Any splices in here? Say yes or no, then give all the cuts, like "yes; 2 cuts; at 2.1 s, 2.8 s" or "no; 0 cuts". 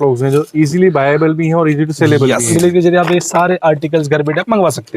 yes; 1 cut; at 2.5 s